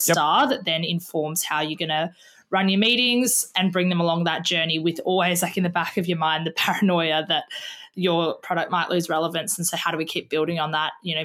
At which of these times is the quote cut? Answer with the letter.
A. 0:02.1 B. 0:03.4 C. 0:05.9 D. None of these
B